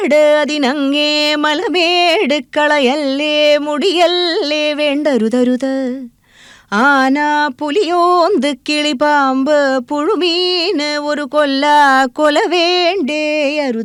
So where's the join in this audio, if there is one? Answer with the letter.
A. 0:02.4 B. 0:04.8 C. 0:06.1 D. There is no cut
D